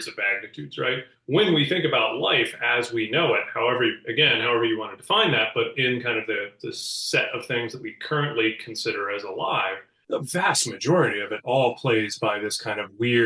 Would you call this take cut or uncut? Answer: cut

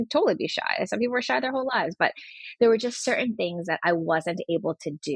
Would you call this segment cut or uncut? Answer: uncut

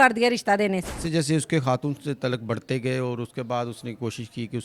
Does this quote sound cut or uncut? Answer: cut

